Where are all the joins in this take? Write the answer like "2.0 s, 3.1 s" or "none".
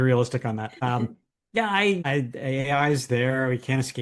1.1 s, 2.0 s